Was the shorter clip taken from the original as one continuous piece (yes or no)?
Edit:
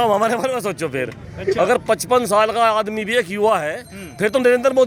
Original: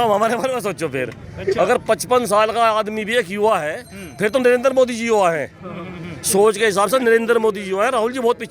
yes